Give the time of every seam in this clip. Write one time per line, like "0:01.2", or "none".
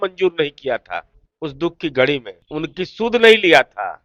0:02.4